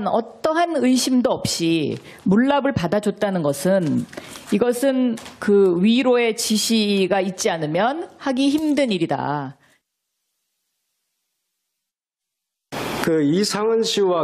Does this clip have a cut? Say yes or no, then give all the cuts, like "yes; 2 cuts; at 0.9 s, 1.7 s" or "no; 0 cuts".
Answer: no; 0 cuts